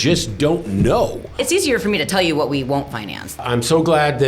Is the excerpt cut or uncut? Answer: cut